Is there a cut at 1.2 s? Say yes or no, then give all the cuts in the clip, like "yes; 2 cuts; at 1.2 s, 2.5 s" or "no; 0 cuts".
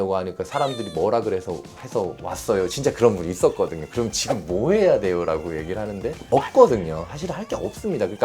no; 1 cut; at 6.3 s